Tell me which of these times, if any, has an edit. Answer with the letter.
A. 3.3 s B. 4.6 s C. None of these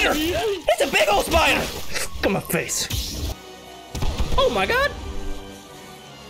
A